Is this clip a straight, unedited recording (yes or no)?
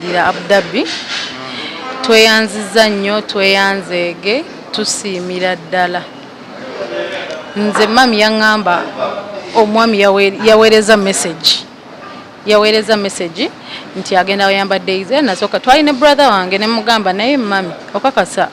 yes